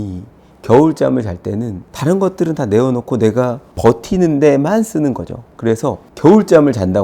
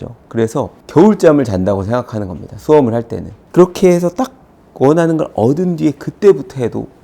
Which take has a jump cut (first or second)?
second